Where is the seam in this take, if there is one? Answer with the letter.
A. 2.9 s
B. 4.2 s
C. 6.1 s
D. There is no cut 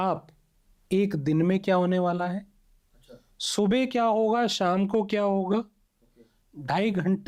D